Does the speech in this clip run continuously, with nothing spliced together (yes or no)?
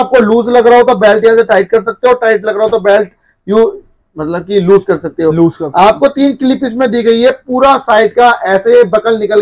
yes